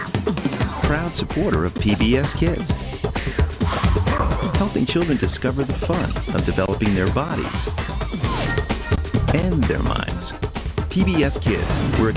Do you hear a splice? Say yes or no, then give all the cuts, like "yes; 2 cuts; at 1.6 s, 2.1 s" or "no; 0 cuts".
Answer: no; 0 cuts